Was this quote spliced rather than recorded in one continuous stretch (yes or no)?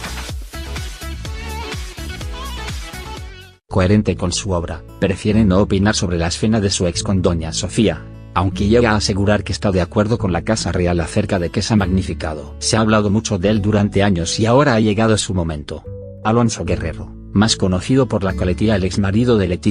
no